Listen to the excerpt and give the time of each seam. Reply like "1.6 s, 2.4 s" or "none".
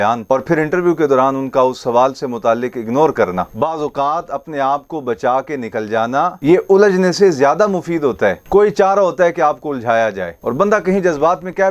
none